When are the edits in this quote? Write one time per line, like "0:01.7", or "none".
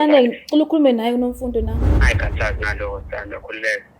0:02.0